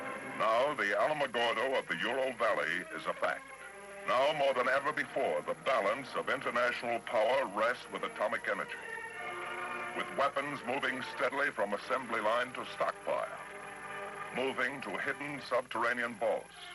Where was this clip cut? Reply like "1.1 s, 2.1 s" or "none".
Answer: 7.6 s